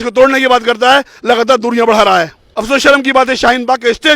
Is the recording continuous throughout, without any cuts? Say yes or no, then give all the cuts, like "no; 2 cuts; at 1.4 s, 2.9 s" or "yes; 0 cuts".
no; 1 cut; at 2.5 s